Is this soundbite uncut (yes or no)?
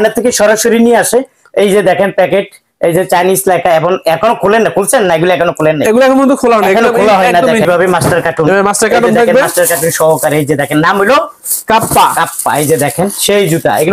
no